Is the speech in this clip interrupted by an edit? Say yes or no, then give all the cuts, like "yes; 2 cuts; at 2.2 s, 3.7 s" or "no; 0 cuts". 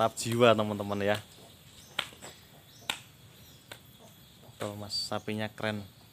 no; 0 cuts